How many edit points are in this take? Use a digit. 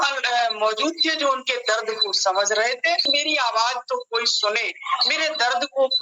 1